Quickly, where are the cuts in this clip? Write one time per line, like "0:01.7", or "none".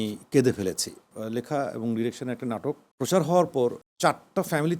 0:01.1
0:02.9
0:03.9